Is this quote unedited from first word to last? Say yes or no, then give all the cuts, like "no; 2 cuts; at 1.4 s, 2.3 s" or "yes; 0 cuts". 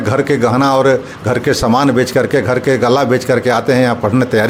yes; 0 cuts